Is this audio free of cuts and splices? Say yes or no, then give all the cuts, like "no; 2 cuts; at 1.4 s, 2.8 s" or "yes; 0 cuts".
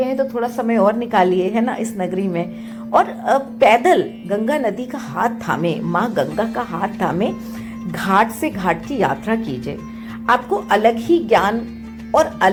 yes; 0 cuts